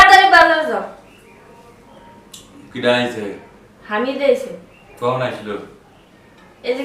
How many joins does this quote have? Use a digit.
0